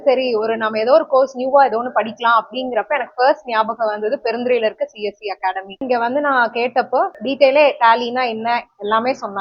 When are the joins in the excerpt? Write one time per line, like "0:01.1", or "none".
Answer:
none